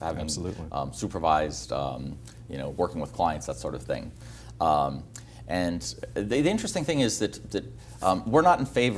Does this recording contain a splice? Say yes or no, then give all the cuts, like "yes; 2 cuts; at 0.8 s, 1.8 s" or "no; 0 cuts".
no; 0 cuts